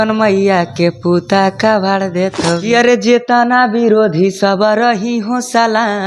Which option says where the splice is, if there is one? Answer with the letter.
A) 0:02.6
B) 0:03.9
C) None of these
A